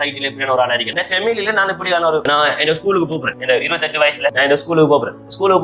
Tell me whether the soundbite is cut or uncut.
cut